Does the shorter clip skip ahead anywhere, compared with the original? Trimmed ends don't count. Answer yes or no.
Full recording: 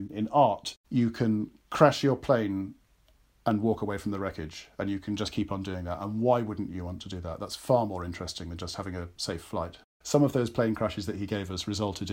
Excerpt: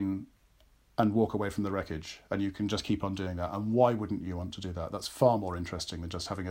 no